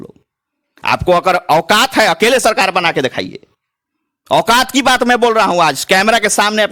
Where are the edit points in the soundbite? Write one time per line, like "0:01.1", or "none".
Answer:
none